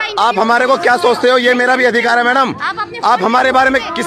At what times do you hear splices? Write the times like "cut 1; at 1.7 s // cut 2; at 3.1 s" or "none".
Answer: none